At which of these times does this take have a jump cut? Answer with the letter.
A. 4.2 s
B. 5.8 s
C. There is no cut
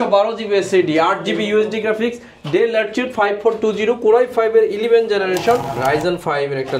B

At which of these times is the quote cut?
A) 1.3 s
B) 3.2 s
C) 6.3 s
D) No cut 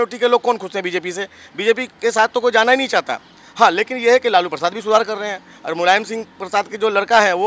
D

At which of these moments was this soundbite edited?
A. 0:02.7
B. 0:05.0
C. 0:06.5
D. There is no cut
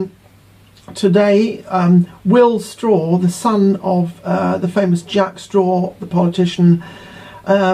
C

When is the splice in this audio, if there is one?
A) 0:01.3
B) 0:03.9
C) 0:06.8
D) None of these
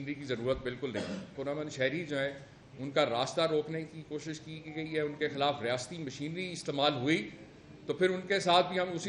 A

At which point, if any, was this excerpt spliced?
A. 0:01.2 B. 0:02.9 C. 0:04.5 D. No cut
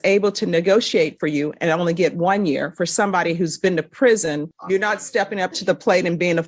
C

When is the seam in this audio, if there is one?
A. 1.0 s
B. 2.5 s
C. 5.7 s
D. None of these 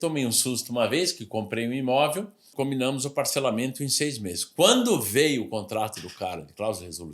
B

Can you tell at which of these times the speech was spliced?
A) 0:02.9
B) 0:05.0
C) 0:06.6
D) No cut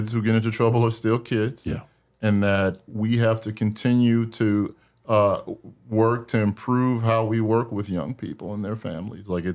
D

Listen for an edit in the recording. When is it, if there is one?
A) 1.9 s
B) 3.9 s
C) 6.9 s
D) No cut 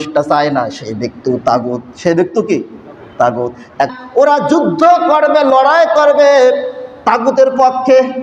B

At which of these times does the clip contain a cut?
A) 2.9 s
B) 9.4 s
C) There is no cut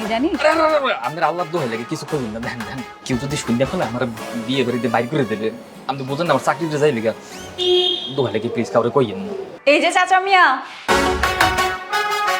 B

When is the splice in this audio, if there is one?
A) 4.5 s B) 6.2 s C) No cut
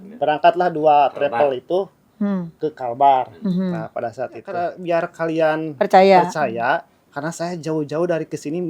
A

